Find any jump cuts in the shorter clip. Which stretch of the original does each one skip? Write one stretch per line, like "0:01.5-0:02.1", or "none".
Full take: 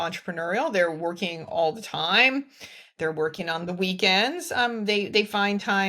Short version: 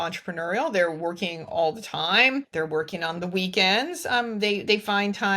0:02.5-0:02.9